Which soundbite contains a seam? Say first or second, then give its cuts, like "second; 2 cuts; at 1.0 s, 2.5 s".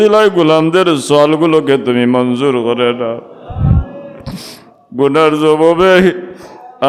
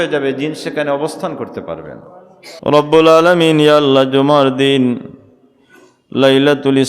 second; 1 cut; at 2.6 s